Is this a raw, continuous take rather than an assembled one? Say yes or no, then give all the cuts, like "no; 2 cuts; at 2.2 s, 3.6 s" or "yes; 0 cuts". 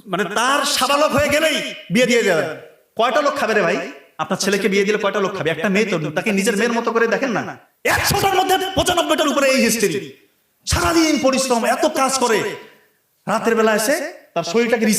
no; 1 cut; at 7.5 s